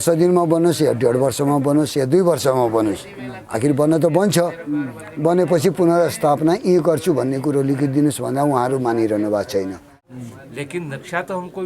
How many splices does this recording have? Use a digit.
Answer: 1